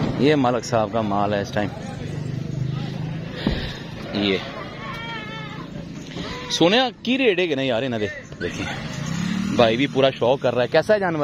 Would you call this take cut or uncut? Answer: cut